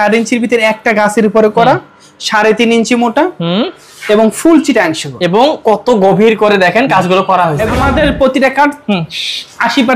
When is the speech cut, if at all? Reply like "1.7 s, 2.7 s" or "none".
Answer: 7.7 s